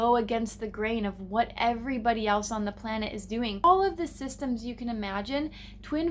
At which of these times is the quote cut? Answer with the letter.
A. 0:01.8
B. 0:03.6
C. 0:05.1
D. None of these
B